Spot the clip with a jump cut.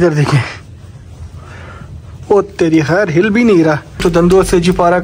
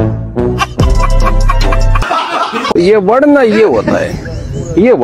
first; 1 cut; at 4.0 s

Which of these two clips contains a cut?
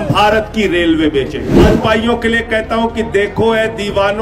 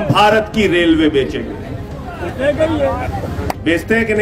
first; 1 cut; at 1.6 s

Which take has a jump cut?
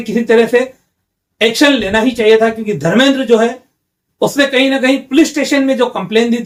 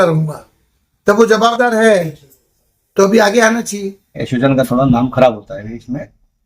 second; 1 cut; at 4.2 s

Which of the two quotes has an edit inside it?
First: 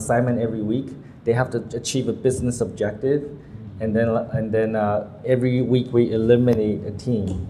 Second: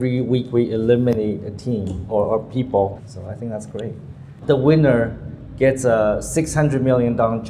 second; 2 cuts; at 3.1 s, 4.4 s

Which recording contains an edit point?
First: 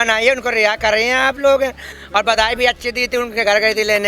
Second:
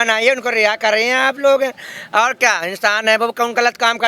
first; 1 cut; at 1.9 s

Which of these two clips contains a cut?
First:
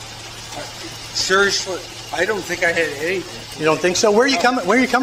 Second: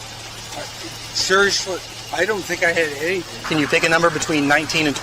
second; 1 cut; at 3.4 s

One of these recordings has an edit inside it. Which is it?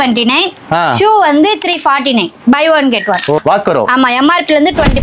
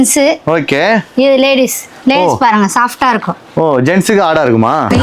first; 1 cut; at 3.4 s

